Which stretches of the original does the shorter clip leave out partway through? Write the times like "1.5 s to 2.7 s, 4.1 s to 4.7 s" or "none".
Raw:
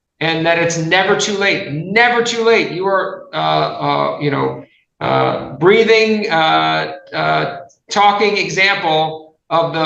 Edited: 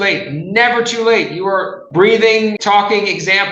3.2 s to 5.5 s, 6.2 s to 7.9 s